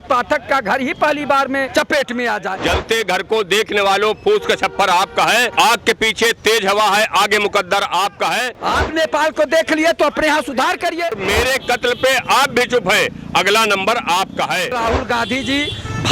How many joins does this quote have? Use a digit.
4